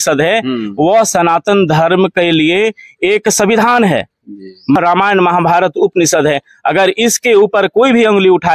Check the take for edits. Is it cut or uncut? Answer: cut